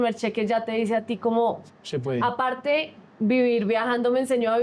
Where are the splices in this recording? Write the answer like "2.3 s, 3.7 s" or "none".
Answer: none